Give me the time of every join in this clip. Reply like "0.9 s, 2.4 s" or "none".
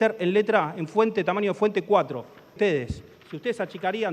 2.6 s